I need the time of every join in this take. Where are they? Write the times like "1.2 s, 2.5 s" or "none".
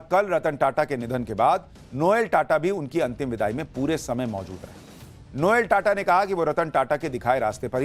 2.9 s

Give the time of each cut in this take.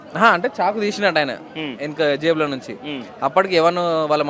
none

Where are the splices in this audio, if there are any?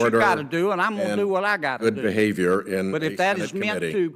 none

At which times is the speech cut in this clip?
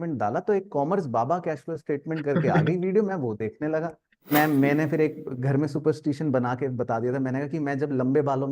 4.3 s

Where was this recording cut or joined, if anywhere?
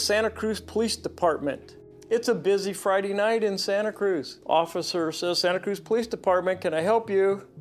4.3 s

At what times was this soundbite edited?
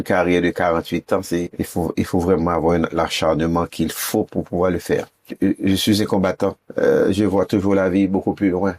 1.5 s, 5.3 s, 6.6 s

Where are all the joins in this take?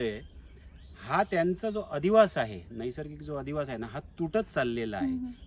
none

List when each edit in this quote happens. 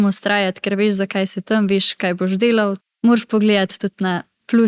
2.8 s

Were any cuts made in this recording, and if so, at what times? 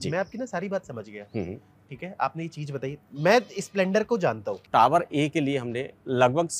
4.6 s

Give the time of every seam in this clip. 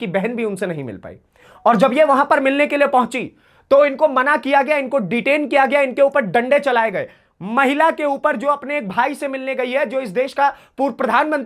none

